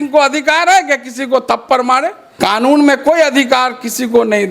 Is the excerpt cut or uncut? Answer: cut